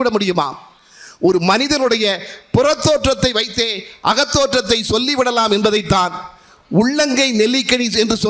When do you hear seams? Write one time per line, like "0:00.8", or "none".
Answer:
none